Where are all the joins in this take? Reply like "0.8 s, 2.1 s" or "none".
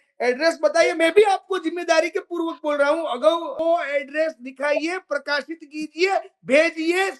3.6 s